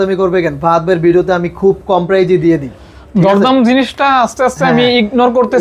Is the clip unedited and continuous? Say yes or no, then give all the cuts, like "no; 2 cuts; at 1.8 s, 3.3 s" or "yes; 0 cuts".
yes; 0 cuts